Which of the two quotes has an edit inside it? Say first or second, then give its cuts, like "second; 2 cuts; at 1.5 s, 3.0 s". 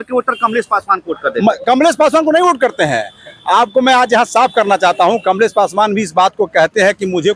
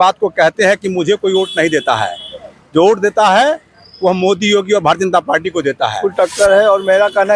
second; 1 cut; at 6.0 s